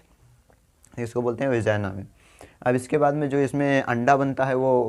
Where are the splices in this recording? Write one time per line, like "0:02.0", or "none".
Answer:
none